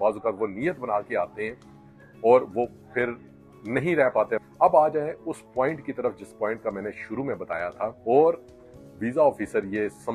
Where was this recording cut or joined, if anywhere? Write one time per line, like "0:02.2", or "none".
0:04.5
0:08.0